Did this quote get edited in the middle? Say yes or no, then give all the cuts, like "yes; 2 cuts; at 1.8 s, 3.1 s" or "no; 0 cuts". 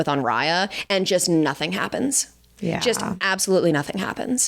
no; 0 cuts